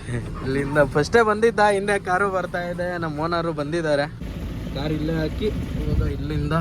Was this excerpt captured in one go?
no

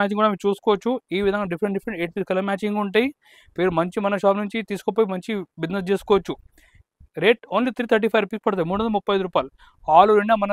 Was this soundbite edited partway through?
no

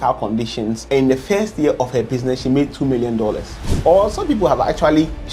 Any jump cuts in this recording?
yes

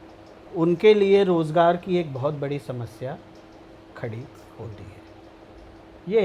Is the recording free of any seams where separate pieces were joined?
yes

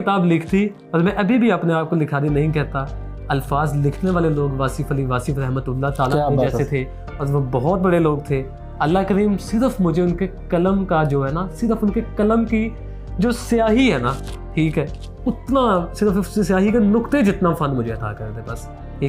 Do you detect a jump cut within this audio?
no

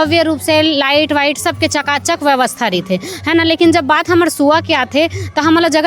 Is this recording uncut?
yes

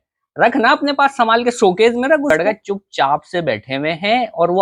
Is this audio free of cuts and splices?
no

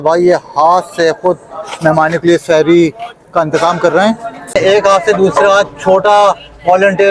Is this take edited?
yes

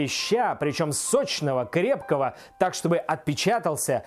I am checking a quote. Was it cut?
no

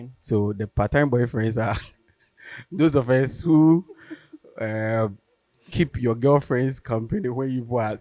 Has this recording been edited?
no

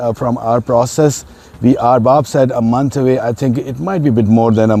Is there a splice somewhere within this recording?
no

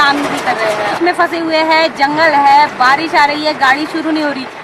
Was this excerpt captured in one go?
no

